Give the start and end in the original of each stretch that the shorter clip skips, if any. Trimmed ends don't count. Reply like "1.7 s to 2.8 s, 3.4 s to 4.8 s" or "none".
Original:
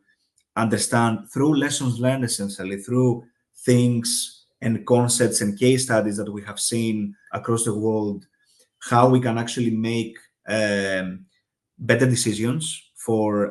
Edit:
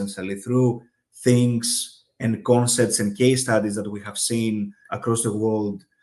none